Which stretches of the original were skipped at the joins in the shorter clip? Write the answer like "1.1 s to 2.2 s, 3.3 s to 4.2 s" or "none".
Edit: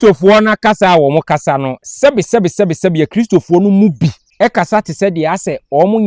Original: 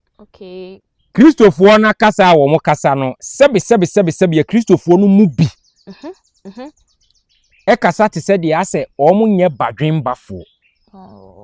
5.6 s to 7.5 s